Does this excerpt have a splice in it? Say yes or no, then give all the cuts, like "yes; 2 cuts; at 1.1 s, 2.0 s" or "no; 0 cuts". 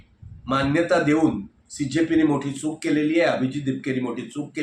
no; 0 cuts